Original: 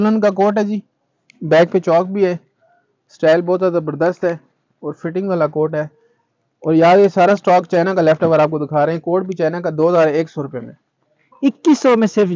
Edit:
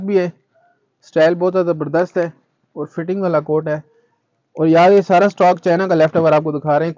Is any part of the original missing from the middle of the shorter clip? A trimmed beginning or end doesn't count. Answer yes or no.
no